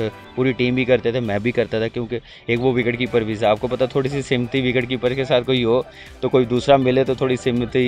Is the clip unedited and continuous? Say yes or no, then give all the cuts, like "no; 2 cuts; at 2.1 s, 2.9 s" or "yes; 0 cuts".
yes; 0 cuts